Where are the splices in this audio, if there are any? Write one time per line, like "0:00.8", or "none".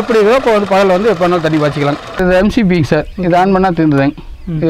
0:02.2